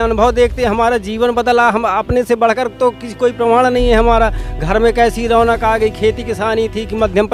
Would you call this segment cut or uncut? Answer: uncut